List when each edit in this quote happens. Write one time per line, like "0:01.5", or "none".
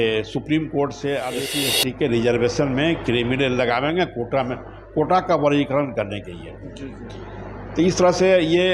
0:01.4